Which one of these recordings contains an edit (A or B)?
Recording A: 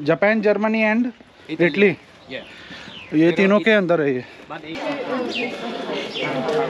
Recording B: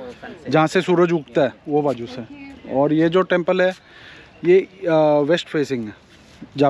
A